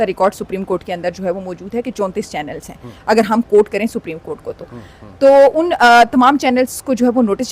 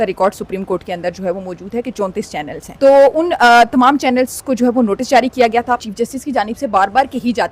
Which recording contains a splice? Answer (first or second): second